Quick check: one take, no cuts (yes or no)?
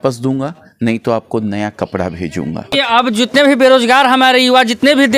no